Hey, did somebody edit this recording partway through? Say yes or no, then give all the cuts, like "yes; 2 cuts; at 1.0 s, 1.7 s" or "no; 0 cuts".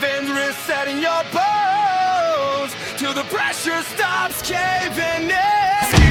no; 0 cuts